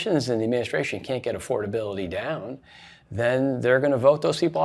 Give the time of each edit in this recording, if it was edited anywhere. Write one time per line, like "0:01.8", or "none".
none